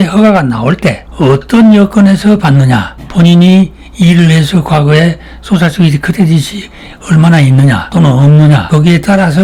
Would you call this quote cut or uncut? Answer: uncut